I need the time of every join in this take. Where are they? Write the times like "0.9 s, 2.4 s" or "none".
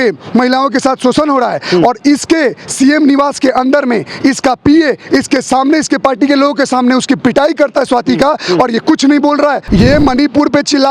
9.6 s